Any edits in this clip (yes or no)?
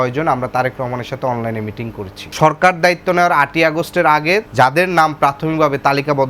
yes